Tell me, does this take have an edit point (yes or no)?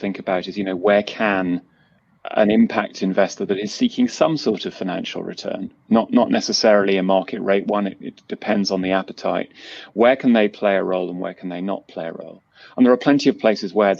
no